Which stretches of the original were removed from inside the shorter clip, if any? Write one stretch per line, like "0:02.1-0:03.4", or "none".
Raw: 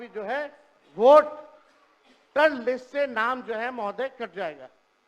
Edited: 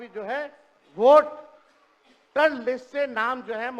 none